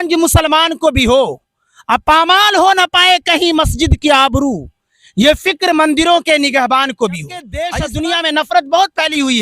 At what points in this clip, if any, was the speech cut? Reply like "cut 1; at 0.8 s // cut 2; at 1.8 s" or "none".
cut 1; at 7.6 s